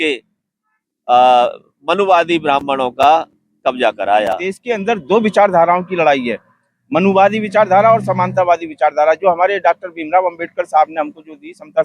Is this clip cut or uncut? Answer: cut